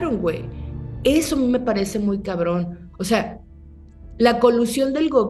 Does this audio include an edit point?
no; 0 cuts

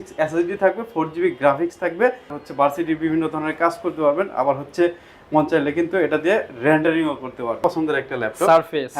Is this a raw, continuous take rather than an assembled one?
no; 2 cuts; at 2.3 s, 7.6 s

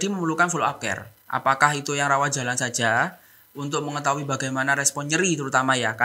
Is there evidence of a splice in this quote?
no; 0 cuts

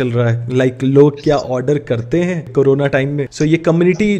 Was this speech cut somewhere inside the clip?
yes; 2 cuts; at 2.5 s, 3.3 s

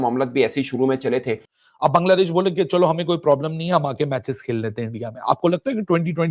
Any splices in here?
yes; 1 cut; at 1.4 s

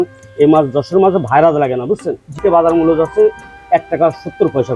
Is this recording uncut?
no; 1 cut; at 2.4 s

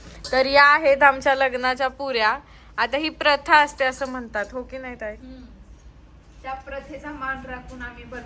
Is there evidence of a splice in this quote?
no; 0 cuts

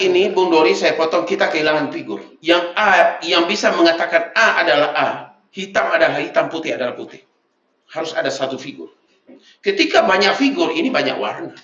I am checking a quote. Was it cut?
no; 0 cuts

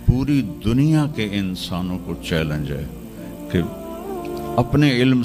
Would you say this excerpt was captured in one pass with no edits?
yes; 0 cuts

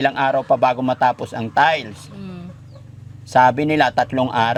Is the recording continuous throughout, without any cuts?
yes; 0 cuts

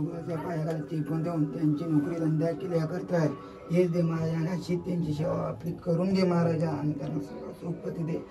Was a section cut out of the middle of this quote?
no; 0 cuts

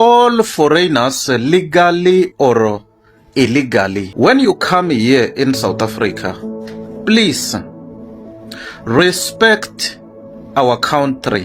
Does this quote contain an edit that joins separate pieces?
yes; 1 cut; at 4.1 s

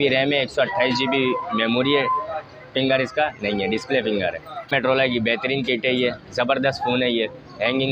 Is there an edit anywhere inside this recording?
yes; 1 cut; at 4.7 s

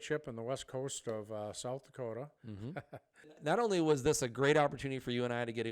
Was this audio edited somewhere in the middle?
yes; 1 cut; at 3.3 s

